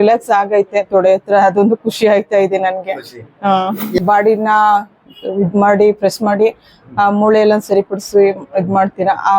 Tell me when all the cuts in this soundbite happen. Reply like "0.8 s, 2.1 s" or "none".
4.0 s